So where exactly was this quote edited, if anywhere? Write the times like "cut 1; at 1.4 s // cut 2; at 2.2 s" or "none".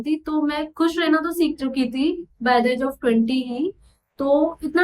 none